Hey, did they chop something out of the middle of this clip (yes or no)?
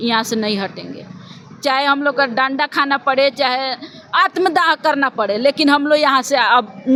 no